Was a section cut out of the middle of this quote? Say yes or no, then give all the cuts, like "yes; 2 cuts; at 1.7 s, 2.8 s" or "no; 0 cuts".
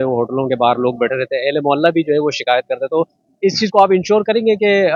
no; 0 cuts